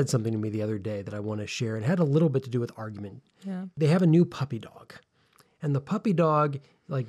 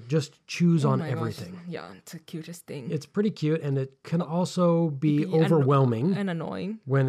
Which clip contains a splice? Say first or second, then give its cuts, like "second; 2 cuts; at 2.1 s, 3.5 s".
first; 1 cut; at 3.7 s